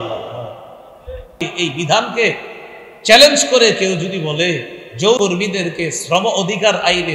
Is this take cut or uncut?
cut